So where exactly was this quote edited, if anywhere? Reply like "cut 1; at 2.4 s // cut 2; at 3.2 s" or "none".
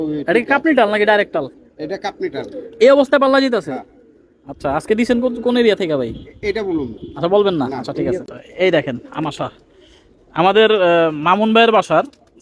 cut 1; at 8.3 s